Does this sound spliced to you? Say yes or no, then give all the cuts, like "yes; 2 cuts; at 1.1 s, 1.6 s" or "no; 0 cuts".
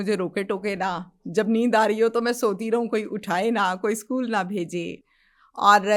no; 0 cuts